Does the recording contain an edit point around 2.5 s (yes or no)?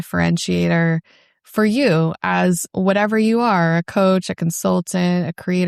no